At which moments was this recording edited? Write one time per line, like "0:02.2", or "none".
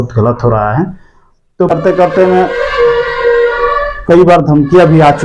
0:01.7